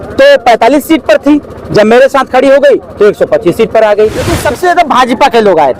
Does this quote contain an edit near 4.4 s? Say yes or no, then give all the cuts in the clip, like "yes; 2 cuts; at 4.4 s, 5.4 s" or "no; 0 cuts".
yes; 1 cut; at 4.4 s